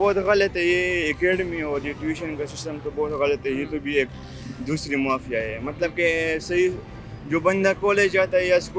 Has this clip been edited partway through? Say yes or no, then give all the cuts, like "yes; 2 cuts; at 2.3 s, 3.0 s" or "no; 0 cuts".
no; 0 cuts